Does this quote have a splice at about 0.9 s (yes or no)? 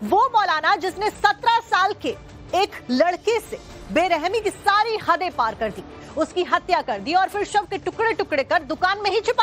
yes